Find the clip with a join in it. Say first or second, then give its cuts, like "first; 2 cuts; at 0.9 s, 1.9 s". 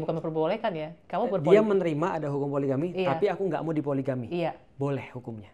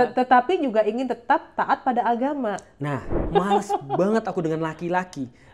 second; 1 cut; at 3.2 s